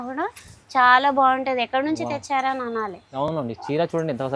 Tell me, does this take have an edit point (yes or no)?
no